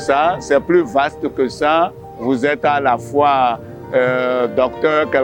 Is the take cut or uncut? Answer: uncut